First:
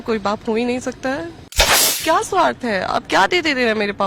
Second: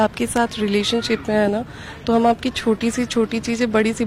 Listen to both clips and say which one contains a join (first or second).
first